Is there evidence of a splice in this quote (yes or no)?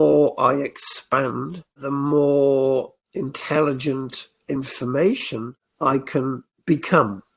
yes